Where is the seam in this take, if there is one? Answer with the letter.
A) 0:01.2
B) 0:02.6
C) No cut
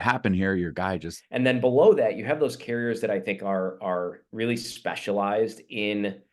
A